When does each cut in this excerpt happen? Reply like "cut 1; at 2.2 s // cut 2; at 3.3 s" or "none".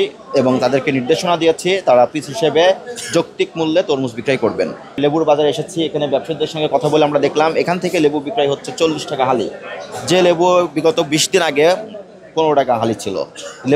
none